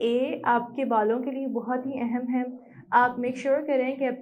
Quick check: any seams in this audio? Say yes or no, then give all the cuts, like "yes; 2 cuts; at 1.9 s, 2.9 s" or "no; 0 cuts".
no; 0 cuts